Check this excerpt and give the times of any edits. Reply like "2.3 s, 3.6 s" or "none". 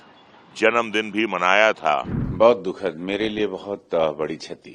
2.2 s